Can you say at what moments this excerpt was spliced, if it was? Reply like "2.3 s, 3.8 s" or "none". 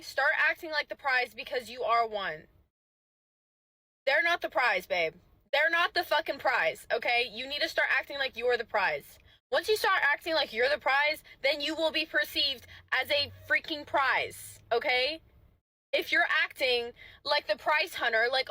7.5 s